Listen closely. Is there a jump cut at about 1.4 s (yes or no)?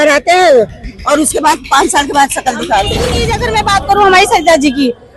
no